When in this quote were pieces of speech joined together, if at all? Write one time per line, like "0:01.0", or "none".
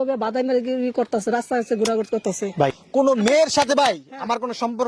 0:02.8